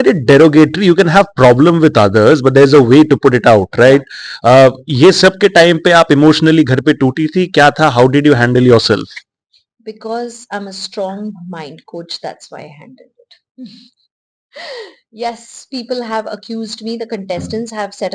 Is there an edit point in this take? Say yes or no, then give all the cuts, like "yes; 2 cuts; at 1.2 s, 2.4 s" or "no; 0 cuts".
no; 0 cuts